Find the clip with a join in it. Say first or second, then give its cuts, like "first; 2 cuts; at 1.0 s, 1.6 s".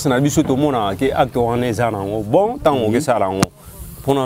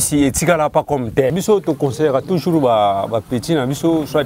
second; 1 cut; at 1.3 s